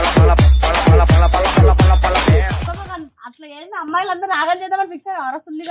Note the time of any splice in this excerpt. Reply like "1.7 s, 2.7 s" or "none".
2.7 s